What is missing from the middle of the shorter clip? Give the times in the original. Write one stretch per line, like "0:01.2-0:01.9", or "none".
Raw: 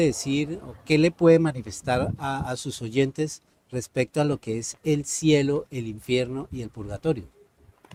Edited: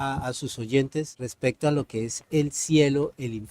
0:03.5-0:03.8